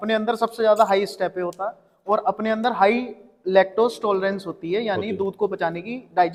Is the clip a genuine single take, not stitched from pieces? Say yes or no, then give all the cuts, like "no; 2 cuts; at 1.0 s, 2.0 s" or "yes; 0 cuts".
yes; 0 cuts